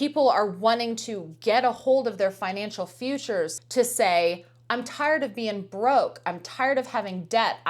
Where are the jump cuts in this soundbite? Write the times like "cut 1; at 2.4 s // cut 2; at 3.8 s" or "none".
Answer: cut 1; at 3.6 s